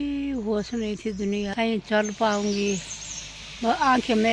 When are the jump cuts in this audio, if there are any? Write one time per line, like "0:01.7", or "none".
0:01.5